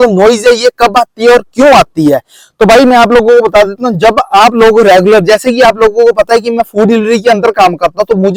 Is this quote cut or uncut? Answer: uncut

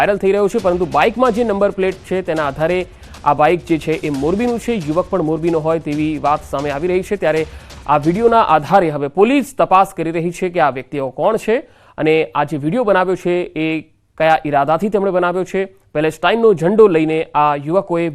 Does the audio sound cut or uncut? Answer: cut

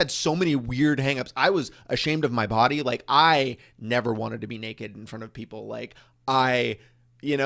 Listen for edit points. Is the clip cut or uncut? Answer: uncut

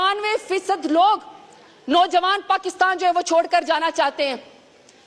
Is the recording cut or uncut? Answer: uncut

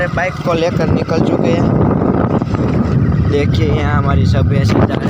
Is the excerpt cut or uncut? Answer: uncut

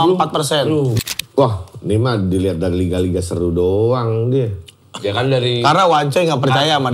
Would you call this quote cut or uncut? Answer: cut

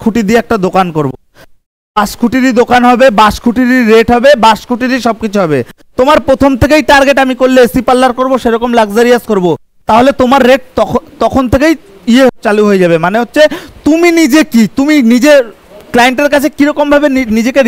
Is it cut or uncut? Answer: uncut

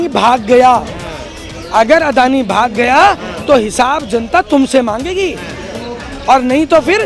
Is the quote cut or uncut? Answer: uncut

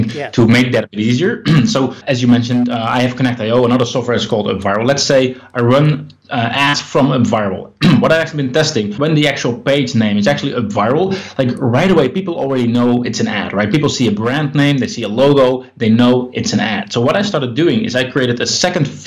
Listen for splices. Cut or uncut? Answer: uncut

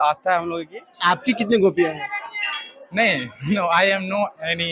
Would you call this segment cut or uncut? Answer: cut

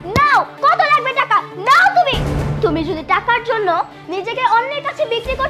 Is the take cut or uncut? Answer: cut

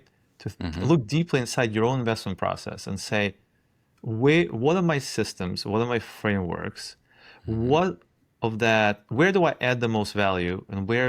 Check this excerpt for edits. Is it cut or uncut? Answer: uncut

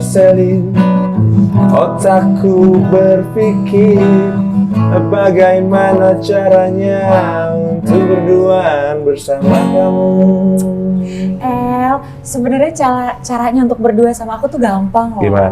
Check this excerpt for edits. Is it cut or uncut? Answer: uncut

